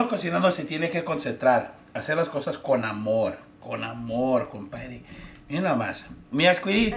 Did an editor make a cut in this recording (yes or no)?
no